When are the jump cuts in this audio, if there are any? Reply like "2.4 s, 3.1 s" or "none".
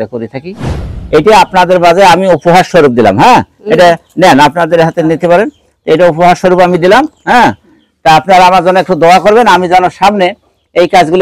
0.9 s